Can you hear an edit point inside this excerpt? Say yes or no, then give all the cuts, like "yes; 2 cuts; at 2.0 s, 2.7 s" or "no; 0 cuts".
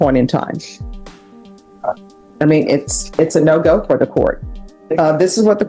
no; 0 cuts